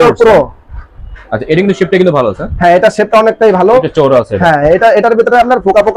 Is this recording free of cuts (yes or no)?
yes